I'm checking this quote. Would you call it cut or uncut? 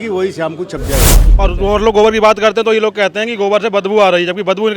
cut